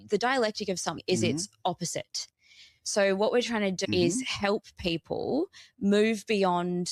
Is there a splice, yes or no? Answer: yes